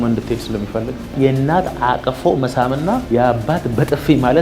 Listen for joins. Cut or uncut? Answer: cut